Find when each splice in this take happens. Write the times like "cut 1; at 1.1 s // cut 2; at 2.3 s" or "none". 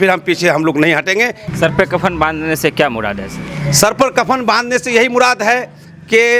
cut 1; at 1.4 s